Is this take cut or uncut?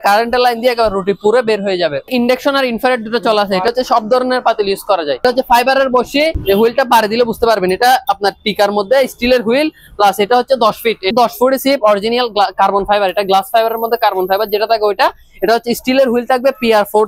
cut